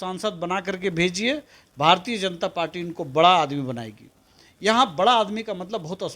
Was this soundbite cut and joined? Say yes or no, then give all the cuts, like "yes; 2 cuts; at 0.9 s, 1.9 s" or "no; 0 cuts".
no; 0 cuts